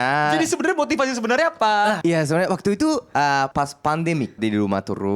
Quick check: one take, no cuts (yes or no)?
no